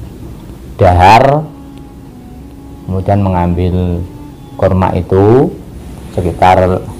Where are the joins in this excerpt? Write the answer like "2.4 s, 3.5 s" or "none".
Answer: none